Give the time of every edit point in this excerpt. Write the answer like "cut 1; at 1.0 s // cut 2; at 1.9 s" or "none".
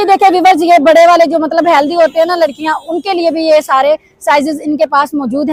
none